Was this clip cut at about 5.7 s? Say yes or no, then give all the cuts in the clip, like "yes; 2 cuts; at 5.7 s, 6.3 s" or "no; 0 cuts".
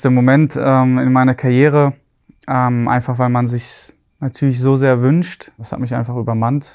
yes; 1 cut; at 5.7 s